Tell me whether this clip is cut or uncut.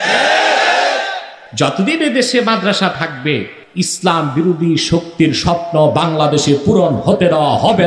cut